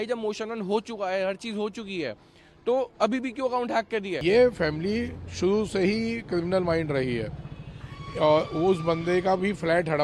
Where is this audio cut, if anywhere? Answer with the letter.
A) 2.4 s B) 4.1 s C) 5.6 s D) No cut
B